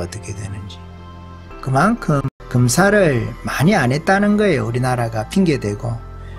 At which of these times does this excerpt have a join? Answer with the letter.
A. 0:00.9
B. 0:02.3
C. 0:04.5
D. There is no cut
B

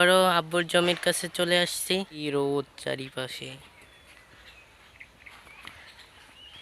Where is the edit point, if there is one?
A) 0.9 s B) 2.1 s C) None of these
B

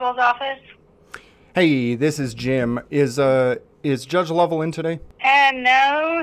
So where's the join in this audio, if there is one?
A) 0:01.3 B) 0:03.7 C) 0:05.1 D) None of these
C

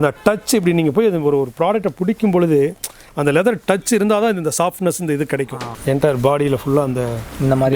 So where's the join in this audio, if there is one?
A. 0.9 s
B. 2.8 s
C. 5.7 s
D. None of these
C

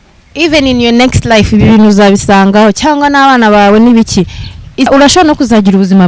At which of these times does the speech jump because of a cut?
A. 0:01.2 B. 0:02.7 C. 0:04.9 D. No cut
C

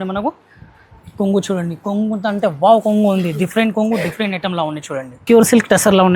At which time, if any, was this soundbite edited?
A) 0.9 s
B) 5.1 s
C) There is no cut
B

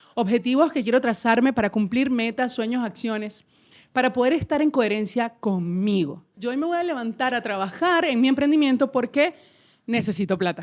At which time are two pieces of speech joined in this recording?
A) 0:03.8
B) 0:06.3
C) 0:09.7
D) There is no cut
B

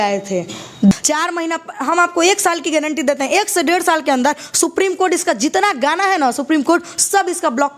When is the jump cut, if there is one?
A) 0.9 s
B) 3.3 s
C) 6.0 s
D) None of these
A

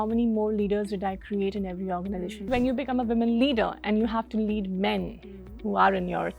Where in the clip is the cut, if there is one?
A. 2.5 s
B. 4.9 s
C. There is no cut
A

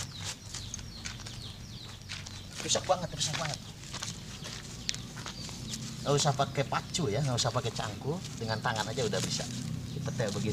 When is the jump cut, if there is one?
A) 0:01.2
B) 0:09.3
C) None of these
C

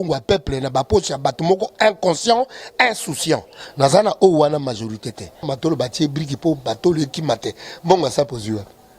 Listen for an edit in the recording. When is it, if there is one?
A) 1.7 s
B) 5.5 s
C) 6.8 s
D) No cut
B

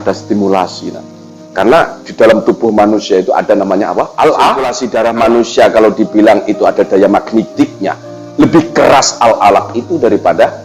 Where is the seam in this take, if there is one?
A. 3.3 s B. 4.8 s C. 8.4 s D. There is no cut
B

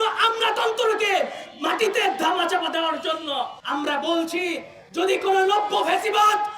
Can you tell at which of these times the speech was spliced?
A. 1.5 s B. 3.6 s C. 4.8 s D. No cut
B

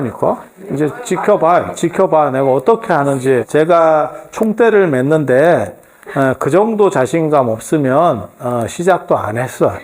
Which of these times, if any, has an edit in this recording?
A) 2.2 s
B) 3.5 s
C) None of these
B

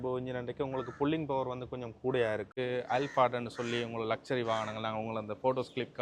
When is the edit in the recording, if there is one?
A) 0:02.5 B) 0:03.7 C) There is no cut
A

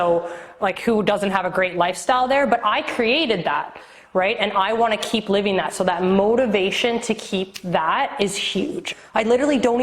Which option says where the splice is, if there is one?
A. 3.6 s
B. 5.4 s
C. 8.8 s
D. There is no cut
C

